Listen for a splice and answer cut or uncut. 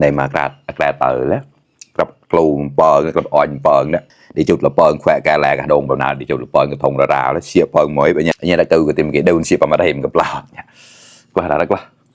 uncut